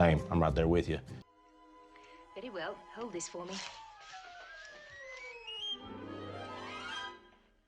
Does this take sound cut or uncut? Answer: uncut